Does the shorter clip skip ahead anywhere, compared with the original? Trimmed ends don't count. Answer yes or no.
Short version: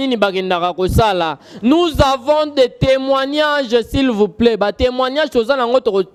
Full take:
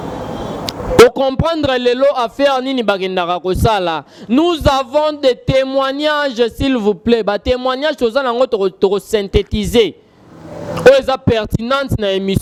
no